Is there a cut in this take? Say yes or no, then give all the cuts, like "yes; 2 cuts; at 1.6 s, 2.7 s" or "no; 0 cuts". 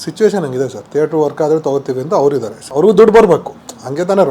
yes; 1 cut; at 2.6 s